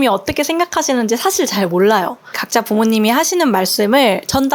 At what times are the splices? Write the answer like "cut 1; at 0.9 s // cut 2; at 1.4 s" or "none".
cut 1; at 2.4 s